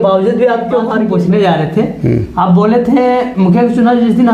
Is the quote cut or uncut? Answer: cut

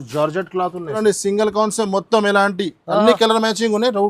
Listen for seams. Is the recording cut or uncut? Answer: cut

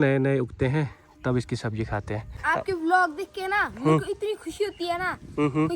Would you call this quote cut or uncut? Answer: cut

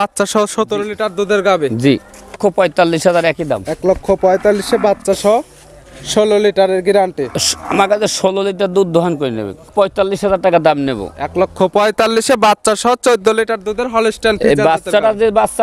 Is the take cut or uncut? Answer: cut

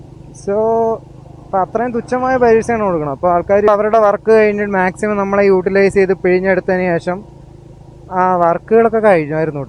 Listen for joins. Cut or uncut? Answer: cut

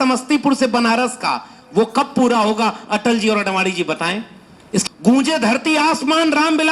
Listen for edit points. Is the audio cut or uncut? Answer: cut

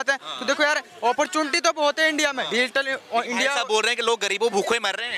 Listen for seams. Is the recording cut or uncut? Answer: uncut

